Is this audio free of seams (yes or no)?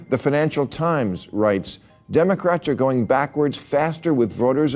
yes